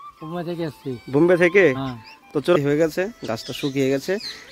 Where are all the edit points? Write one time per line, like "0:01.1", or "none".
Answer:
0:02.5